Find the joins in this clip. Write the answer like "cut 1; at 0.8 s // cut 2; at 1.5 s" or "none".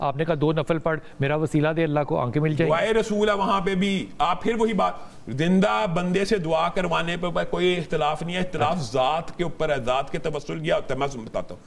none